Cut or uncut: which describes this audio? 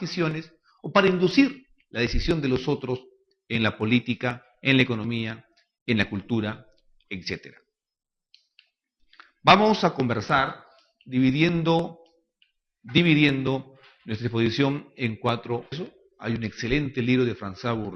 uncut